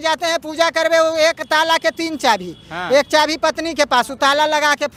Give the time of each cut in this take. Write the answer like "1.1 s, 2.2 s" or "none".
none